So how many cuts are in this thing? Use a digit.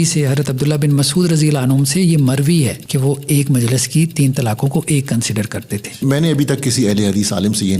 2